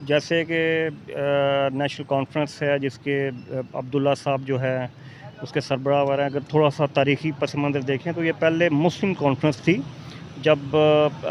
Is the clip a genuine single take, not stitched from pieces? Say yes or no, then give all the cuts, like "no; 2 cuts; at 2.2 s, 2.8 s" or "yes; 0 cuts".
yes; 0 cuts